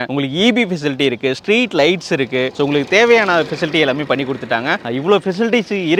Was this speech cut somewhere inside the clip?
no; 0 cuts

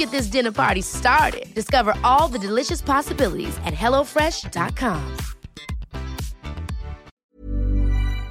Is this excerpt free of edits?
no; 1 cut; at 7.3 s

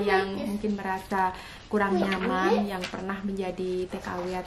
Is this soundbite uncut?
yes; 0 cuts

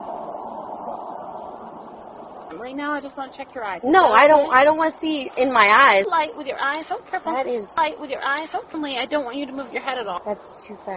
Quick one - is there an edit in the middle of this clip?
yes; 4 cuts; at 2.5 s, 6.1 s, 8.7 s, 10.2 s

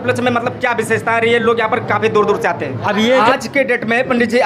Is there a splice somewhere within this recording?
yes; 1 cut; at 3.2 s

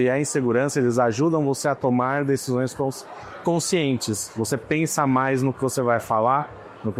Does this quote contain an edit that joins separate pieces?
no; 0 cuts

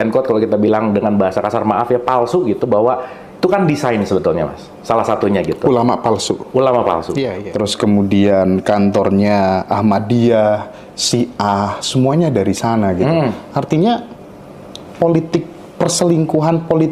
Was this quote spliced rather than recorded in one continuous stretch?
yes; 1 cut; at 7.4 s

